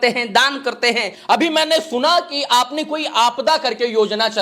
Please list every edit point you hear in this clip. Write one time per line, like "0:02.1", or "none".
0:01.1